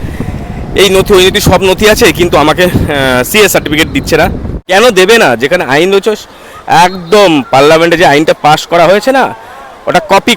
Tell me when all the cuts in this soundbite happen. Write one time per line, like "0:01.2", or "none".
0:04.5